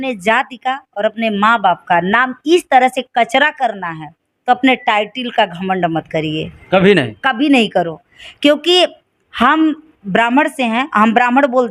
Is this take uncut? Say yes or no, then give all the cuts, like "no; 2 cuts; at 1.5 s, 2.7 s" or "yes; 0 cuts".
yes; 0 cuts